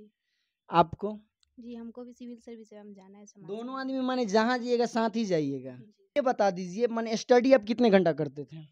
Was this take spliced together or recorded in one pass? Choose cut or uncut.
cut